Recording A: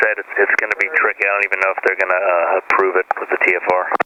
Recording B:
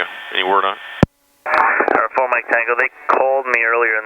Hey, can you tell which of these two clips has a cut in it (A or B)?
B